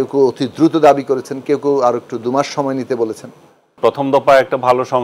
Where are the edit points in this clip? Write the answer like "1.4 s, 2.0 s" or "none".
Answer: 3.7 s